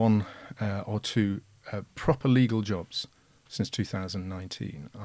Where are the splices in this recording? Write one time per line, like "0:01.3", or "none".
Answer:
none